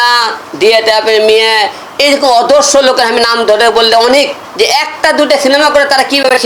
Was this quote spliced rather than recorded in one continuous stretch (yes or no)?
no